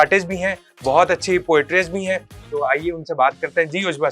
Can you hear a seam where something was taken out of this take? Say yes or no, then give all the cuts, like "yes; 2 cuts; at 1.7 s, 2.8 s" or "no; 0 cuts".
no; 0 cuts